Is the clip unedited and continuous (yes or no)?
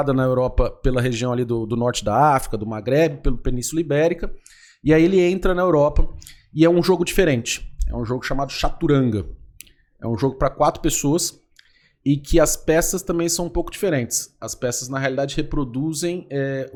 yes